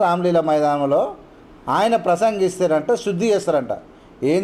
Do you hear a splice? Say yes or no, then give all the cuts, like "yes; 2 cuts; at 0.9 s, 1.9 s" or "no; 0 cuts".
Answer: no; 0 cuts